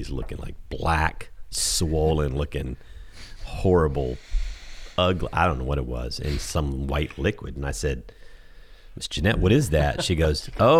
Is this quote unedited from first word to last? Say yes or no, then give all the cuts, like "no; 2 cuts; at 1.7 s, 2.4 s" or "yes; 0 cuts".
yes; 0 cuts